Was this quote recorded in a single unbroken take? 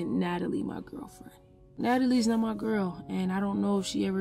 no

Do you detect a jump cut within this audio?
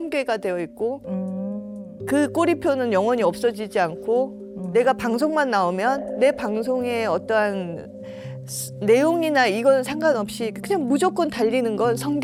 no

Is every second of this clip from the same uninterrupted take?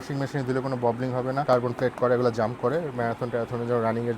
no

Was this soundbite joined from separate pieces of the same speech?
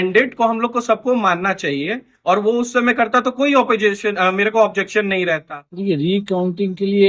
yes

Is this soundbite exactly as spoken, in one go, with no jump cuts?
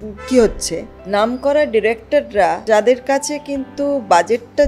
no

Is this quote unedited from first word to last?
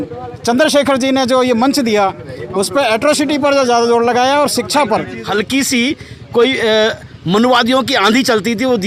no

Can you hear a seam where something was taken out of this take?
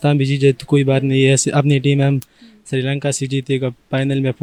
no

